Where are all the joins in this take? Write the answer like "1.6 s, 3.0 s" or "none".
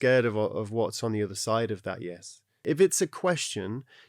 2.5 s